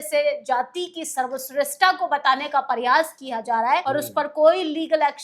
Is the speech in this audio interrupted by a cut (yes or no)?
yes